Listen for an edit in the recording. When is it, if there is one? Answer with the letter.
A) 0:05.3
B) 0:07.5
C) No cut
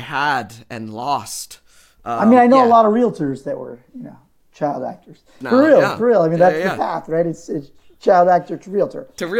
A